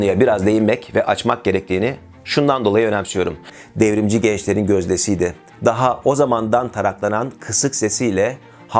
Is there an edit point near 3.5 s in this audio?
yes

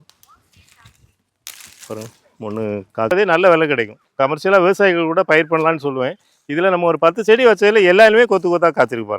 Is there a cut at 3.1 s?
yes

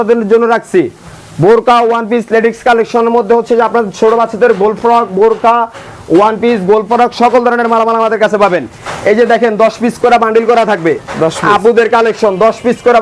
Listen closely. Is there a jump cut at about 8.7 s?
no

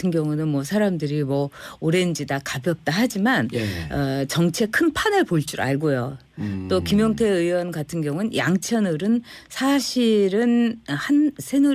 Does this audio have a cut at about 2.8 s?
yes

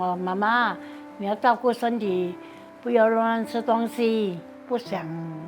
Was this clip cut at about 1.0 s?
no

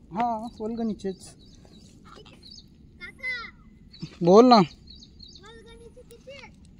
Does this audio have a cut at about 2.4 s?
yes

